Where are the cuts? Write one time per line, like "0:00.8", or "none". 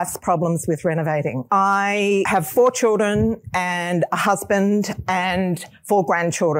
0:01.4
0:02.3